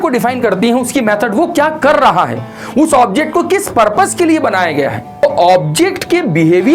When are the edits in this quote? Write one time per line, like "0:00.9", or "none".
0:05.2